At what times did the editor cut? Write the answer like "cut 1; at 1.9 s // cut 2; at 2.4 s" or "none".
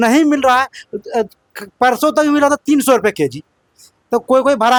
none